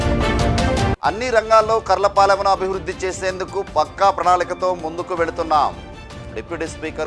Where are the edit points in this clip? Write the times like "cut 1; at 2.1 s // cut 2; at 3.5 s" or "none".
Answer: none